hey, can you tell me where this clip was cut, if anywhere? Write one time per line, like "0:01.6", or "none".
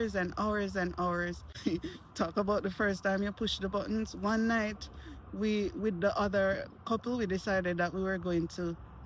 0:01.5